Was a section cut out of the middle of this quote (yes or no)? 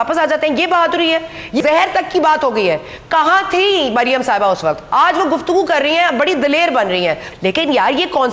yes